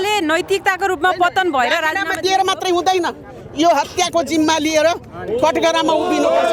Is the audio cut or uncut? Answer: uncut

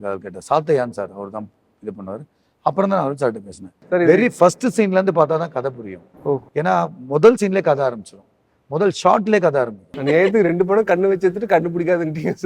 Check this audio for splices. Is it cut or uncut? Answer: cut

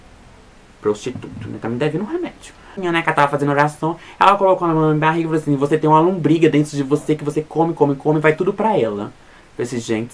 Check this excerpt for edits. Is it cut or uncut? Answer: cut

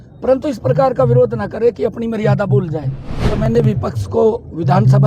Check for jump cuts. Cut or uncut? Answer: cut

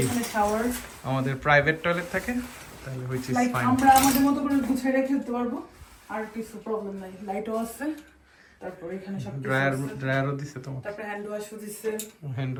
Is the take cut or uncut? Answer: uncut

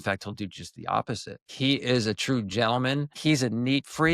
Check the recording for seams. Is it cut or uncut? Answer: cut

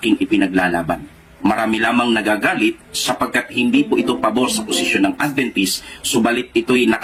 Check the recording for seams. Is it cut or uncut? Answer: uncut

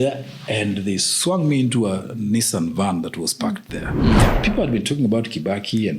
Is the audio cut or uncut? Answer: cut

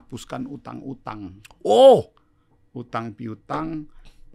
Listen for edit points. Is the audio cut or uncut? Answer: uncut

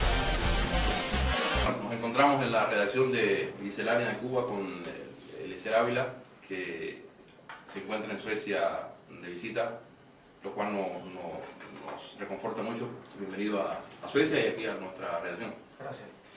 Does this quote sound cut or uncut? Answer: cut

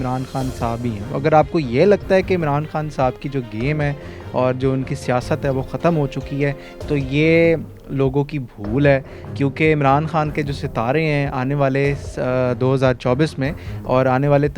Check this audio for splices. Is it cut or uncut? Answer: uncut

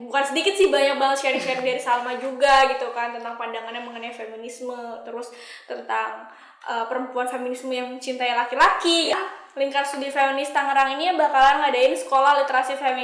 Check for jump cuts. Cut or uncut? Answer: cut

